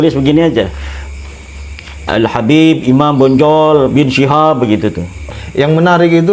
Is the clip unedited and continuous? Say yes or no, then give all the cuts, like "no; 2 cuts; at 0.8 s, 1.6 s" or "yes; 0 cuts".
no; 1 cut; at 5.2 s